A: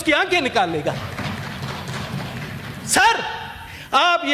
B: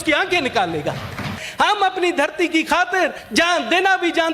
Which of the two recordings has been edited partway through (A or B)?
B